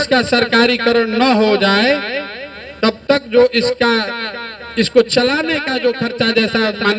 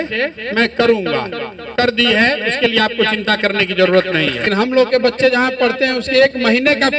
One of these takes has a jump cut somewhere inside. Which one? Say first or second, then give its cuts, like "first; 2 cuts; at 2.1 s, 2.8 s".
second; 1 cut; at 4.5 s